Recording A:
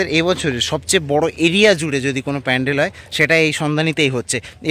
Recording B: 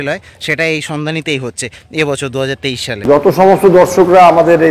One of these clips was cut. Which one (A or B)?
B